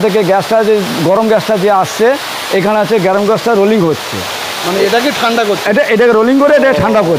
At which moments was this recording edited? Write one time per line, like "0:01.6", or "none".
none

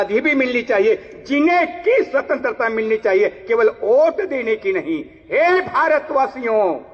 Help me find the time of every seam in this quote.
none

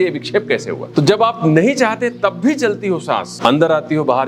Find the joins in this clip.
0:00.8
0:03.3

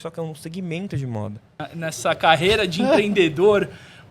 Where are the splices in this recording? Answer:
0:01.6

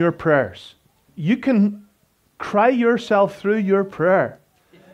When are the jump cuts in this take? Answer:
0:01.1

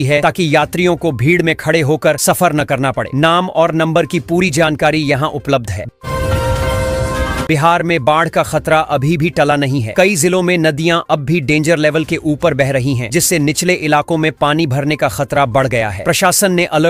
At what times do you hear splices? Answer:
0:05.9
0:07.4

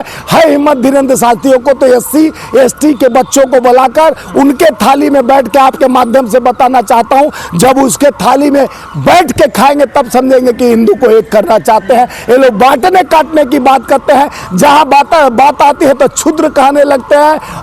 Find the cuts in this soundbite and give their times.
none

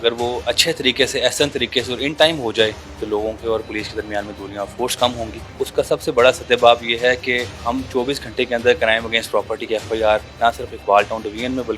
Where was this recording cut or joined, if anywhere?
0:02.9
0:05.4
0:07.6
0:10.3

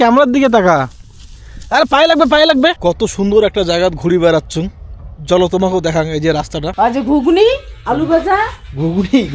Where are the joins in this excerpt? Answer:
0:02.8
0:06.7

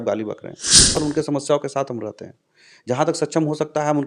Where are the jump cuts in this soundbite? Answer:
0:00.9

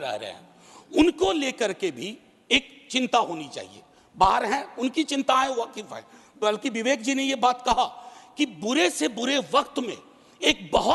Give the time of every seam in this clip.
none

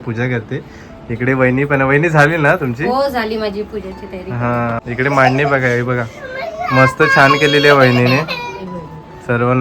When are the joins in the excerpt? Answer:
0:04.8

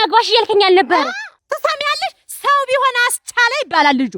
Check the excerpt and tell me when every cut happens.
0:01.4

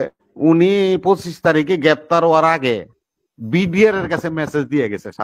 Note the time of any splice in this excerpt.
none

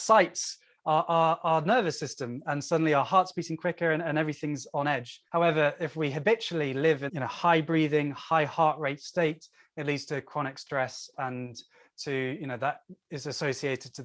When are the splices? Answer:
0:05.1
0:07.1

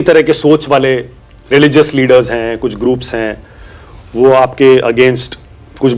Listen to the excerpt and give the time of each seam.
none

